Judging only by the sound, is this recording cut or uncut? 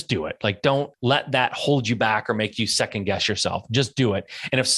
cut